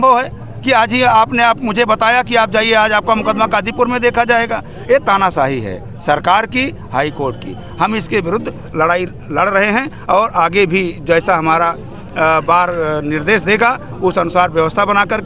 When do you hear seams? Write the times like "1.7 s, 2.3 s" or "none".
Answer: none